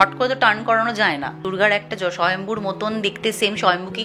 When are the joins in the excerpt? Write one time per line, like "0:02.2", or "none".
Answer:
0:01.4